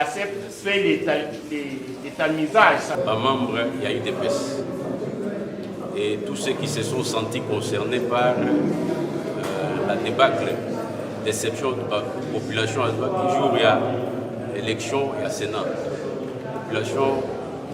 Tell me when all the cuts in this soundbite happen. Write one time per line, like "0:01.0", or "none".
0:03.0